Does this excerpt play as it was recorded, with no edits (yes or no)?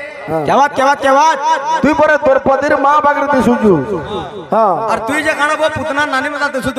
yes